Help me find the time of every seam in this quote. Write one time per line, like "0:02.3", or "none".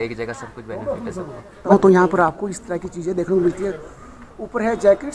none